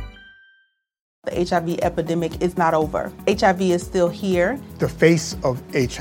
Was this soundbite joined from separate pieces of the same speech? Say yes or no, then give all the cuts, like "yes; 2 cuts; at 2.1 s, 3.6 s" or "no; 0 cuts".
yes; 1 cut; at 1.1 s